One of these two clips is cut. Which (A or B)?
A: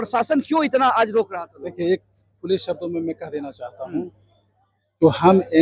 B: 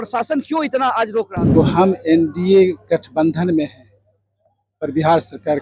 B